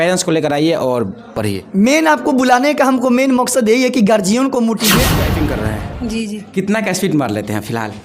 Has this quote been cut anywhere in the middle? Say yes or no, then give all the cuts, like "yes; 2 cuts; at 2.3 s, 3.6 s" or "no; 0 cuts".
yes; 1 cut; at 5.1 s